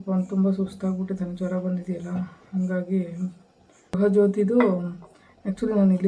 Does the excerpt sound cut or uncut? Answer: cut